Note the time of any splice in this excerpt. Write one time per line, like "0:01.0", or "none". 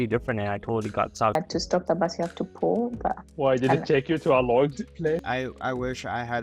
0:01.4
0:05.2